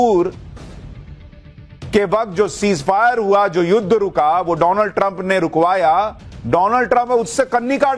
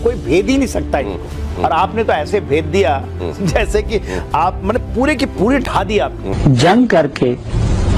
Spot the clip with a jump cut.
second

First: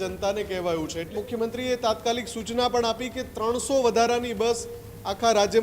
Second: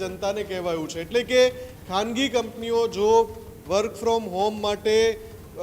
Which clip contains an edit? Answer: first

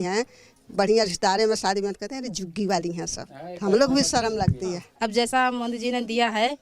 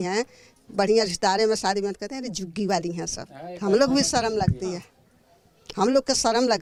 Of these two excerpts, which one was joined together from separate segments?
first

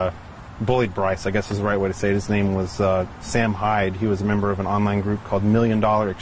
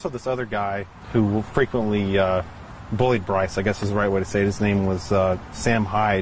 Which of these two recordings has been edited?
second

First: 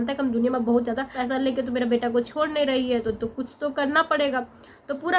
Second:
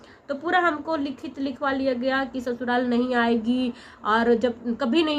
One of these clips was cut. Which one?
first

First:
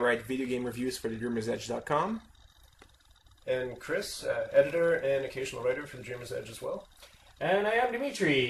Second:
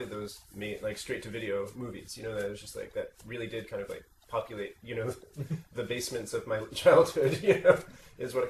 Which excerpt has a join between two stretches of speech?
second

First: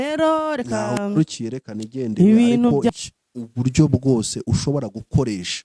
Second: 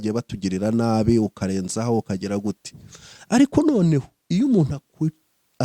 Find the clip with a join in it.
first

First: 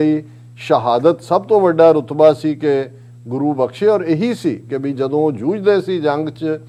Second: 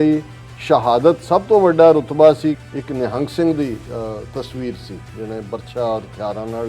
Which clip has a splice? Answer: second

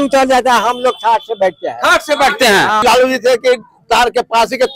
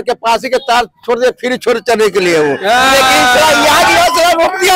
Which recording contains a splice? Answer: first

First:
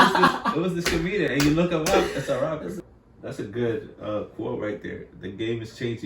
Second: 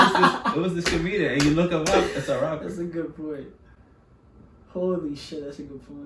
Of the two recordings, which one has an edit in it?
first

